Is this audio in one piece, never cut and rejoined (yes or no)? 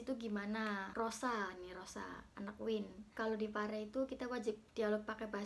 no